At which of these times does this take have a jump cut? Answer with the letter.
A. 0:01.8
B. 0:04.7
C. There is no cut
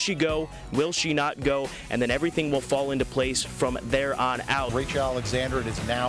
B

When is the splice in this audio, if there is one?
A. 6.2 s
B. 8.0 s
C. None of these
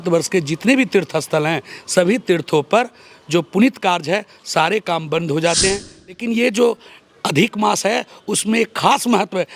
A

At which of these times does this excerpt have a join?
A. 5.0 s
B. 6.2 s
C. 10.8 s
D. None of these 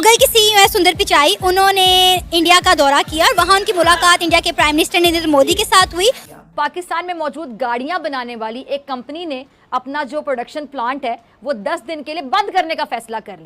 B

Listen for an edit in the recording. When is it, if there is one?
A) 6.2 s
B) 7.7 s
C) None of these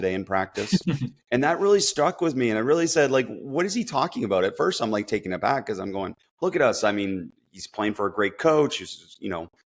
A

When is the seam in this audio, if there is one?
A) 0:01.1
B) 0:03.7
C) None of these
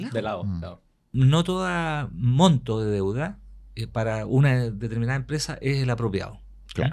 A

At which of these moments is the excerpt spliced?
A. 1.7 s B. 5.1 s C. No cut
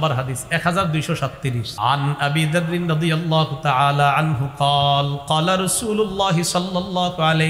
A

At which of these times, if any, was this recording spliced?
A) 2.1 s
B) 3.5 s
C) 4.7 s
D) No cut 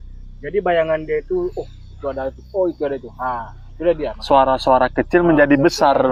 D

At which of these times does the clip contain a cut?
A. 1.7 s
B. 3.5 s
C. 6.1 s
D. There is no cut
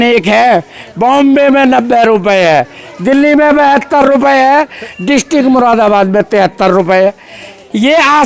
D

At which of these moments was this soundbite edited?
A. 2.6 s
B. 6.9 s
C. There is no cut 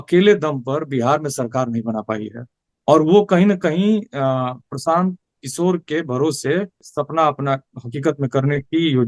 B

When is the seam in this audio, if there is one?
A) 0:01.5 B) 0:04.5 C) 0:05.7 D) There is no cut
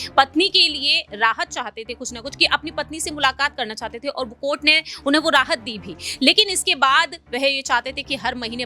D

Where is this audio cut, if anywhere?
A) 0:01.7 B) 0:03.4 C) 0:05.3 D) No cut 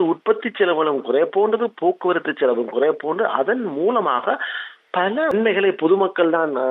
C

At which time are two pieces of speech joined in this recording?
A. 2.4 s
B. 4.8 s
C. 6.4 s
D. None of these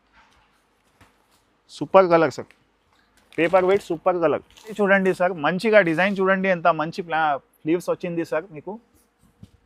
B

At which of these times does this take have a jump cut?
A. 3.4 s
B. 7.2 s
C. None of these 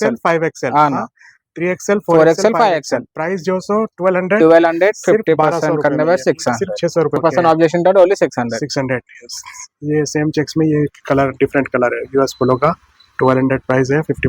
B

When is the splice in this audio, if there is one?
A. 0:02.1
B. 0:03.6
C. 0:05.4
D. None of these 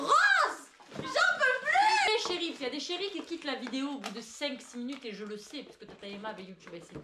A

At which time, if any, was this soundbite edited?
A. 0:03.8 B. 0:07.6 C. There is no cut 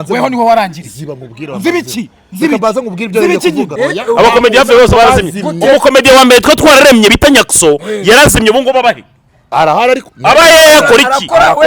A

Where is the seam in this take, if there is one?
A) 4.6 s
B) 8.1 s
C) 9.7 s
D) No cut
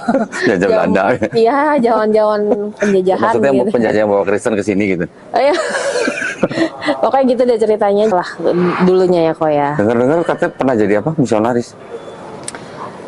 B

